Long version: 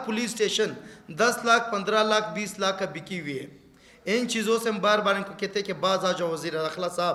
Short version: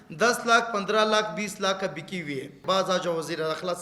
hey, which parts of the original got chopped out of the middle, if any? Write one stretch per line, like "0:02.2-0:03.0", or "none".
0:03.6-0:05.7